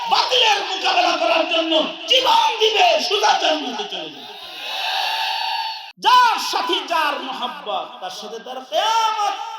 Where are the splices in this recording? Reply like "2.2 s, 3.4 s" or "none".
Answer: 5.9 s

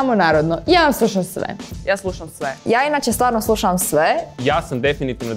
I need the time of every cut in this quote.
4.3 s

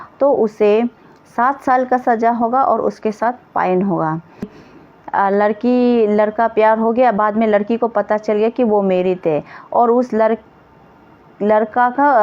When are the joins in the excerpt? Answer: 4.6 s

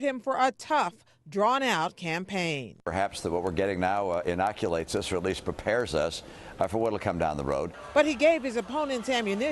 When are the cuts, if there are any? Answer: 5.8 s

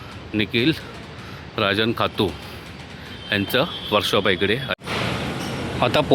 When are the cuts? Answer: 4.8 s

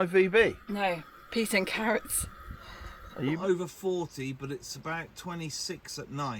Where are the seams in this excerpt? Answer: 3.4 s

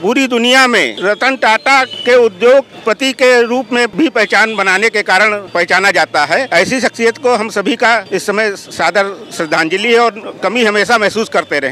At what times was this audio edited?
0.9 s, 1.9 s, 2.7 s, 3.9 s, 5.5 s, 6.5 s, 8.1 s

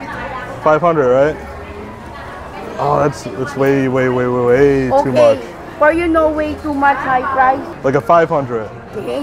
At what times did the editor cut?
7.7 s

